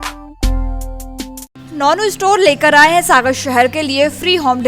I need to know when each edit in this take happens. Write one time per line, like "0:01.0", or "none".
none